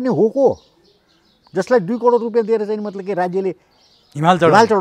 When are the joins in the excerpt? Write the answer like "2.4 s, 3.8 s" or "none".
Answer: none